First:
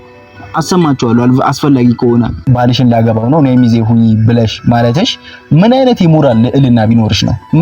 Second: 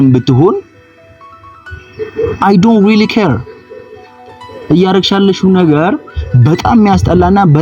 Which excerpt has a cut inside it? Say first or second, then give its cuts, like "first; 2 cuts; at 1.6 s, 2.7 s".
first; 1 cut; at 2.4 s